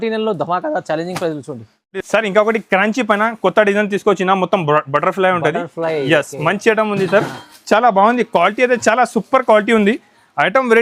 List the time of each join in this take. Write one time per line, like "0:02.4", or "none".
none